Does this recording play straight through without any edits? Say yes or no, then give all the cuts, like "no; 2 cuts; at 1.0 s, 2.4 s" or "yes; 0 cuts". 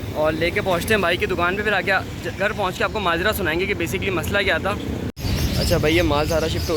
no; 1 cut; at 5.1 s